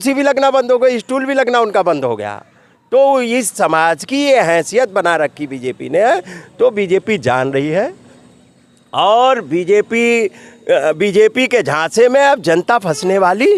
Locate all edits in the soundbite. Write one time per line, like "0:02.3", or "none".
none